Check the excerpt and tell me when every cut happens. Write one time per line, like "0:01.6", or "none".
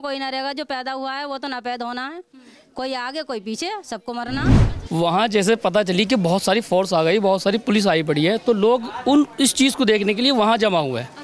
0:04.7